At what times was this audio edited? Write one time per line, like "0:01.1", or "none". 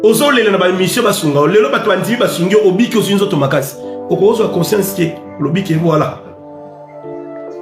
0:06.7